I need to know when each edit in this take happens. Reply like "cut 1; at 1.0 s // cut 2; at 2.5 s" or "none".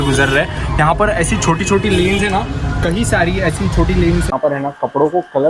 cut 1; at 4.3 s